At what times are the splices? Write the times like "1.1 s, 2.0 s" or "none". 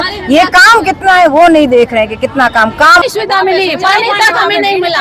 3.0 s